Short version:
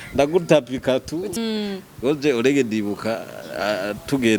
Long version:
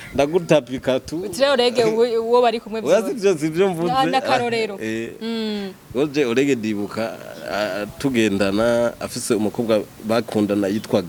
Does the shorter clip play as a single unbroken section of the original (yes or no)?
no